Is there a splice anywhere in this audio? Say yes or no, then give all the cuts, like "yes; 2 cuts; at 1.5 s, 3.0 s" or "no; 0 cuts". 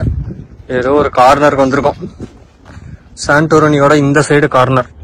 no; 0 cuts